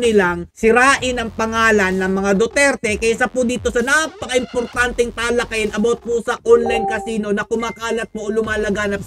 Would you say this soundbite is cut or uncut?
uncut